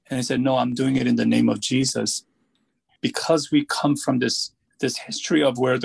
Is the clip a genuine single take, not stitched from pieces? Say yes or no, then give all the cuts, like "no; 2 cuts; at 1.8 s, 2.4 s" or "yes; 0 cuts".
no; 2 cuts; at 2.9 s, 4.6 s